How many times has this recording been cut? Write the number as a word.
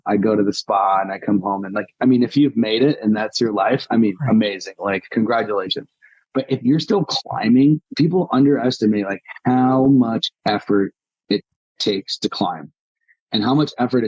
one